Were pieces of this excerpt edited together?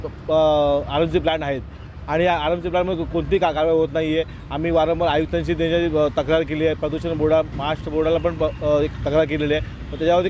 no; 0 cuts

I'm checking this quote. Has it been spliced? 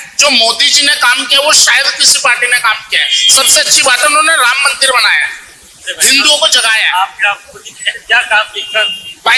no; 0 cuts

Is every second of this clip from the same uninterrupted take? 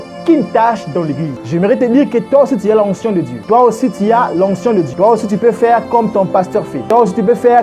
no; 4 cuts; at 1.3 s, 3.3 s, 4.9 s, 6.8 s

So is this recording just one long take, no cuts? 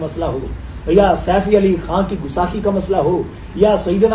yes; 0 cuts

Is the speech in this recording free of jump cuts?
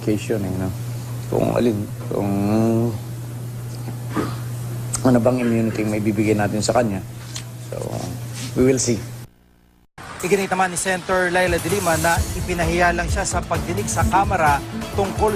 yes; 0 cuts

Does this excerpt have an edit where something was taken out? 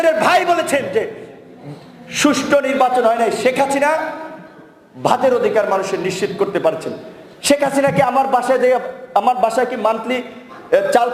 no; 0 cuts

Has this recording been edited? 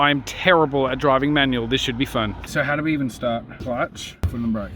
yes; 2 cuts; at 2.4 s, 3.6 s

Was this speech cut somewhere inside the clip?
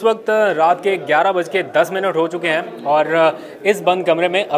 no; 0 cuts

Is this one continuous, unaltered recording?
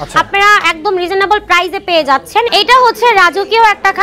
no; 1 cut; at 2.5 s

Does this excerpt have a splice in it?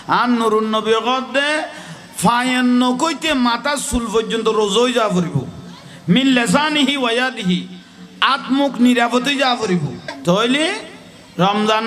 yes; 1 cut; at 10.2 s

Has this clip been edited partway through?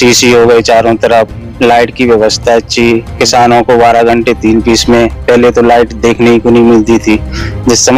no; 0 cuts

